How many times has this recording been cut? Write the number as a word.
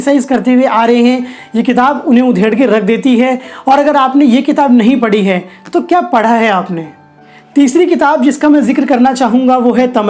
zero